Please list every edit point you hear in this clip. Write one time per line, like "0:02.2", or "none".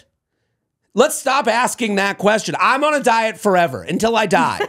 none